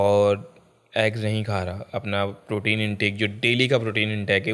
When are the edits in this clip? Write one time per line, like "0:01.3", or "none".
none